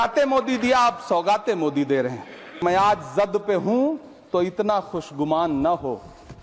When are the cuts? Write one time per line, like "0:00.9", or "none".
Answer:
0:02.6